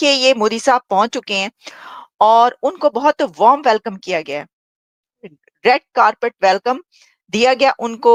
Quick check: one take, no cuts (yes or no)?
yes